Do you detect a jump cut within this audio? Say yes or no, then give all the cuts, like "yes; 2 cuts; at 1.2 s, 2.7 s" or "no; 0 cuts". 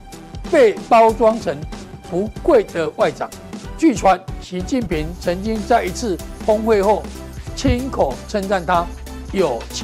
no; 0 cuts